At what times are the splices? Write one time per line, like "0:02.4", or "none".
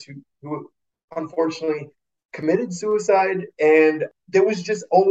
0:04.1